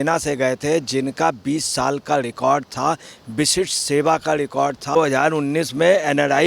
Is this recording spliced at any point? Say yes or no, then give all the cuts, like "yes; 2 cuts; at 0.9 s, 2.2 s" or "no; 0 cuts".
yes; 1 cut; at 5.0 s